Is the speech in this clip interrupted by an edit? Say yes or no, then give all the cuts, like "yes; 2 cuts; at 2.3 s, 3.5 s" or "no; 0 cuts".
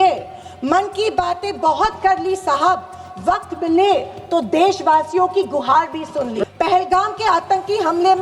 yes; 1 cut; at 6.4 s